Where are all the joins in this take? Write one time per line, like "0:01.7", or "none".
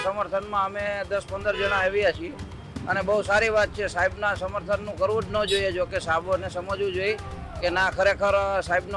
none

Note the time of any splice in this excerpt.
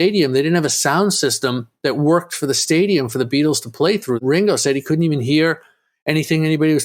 0:04.2

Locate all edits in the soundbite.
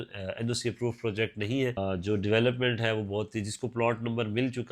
0:01.8

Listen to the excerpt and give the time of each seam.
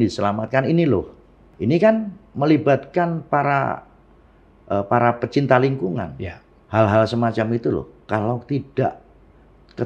0:01.5
0:06.5

